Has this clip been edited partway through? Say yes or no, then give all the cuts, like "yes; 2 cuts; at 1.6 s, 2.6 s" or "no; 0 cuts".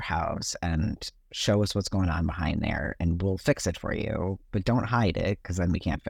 no; 0 cuts